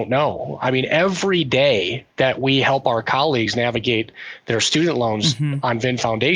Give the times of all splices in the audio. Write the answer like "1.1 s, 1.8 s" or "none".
none